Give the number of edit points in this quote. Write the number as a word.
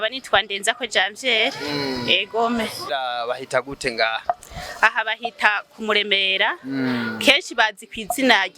one